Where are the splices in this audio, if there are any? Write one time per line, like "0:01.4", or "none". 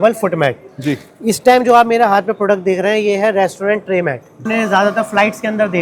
0:04.4